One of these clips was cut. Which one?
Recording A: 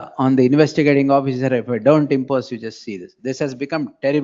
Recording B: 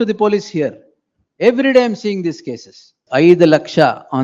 B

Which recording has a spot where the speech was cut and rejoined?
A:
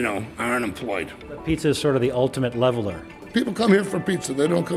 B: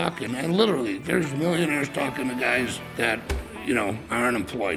A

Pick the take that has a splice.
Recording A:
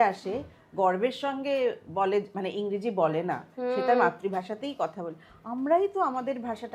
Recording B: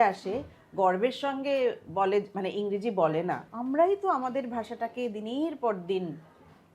B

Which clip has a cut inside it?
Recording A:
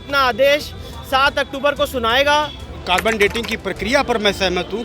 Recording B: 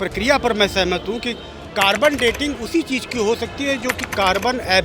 A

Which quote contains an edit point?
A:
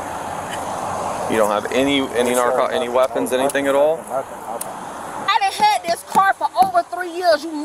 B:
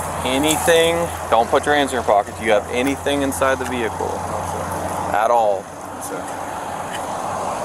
A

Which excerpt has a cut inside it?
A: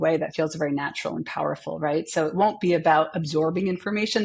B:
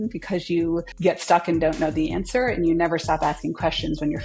B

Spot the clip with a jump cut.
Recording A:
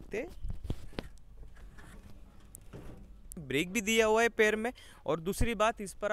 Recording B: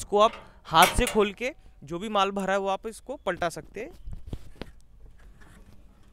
A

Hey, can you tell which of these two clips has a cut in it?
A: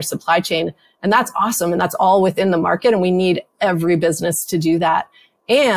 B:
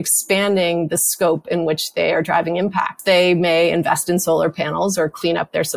B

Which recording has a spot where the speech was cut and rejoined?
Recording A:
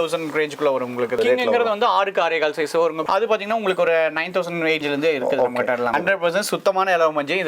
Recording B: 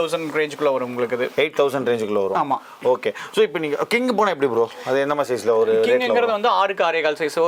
A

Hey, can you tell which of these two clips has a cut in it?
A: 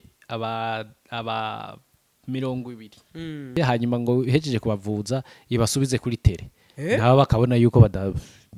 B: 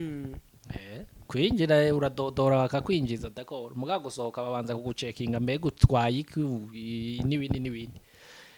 A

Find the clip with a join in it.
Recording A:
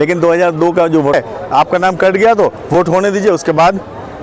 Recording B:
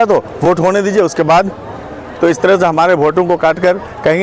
A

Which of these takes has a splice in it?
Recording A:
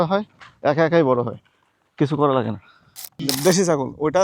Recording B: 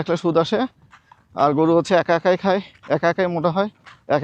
A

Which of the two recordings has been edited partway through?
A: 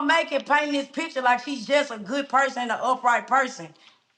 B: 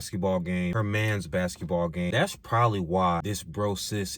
B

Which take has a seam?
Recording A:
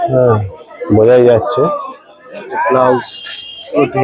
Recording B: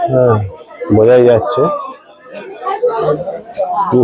A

